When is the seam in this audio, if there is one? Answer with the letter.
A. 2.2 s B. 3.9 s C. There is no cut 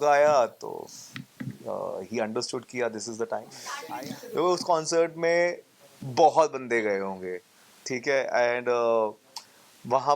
B